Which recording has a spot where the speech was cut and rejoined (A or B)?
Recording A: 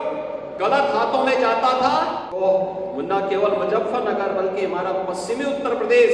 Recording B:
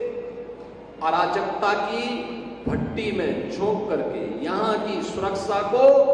A